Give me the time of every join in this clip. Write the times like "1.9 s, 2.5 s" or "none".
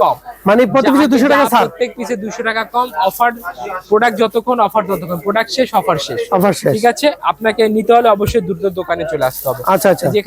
none